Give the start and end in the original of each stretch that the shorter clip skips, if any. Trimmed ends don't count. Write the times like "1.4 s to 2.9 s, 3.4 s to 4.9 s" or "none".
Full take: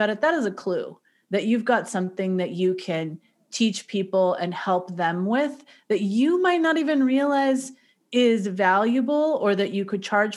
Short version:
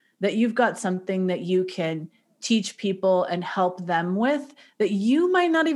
none